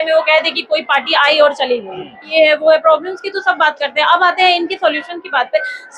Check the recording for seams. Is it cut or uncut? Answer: cut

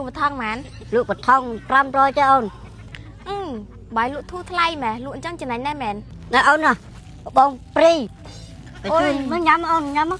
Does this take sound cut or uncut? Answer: uncut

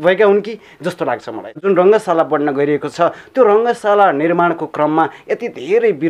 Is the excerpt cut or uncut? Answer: cut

